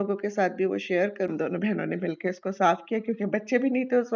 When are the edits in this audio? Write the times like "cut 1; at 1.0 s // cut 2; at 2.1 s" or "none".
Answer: cut 1; at 1.3 s